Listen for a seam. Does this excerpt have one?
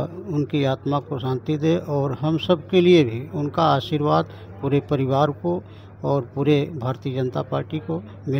no; 0 cuts

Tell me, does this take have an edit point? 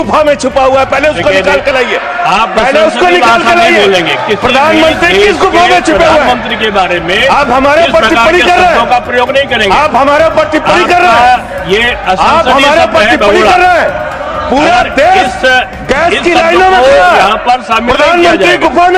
no; 0 cuts

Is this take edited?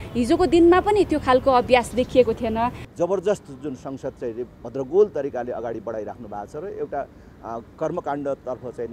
yes; 1 cut; at 2.8 s

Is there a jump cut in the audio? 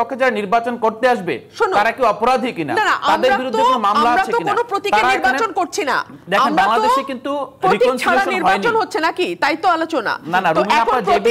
no; 0 cuts

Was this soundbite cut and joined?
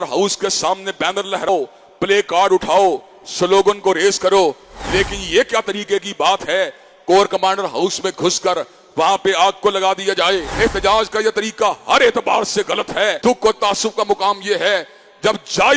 yes; 3 cuts; at 1.5 s, 10.5 s, 13.2 s

